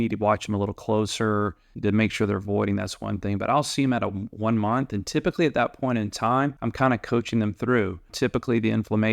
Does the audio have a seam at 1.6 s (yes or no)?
yes